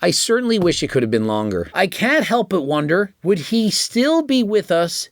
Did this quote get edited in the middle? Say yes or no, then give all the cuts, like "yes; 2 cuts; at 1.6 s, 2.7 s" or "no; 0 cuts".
yes; 2 cuts; at 1.6 s, 3.1 s